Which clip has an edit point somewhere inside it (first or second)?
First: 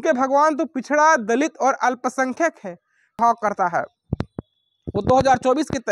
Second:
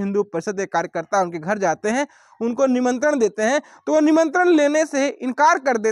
first